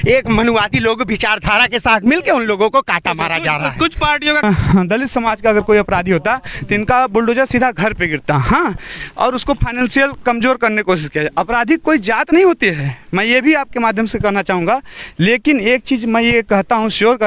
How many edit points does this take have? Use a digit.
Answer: 1